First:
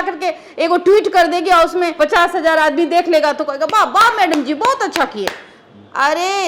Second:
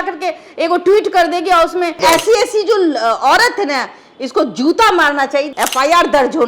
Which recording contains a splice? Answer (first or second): second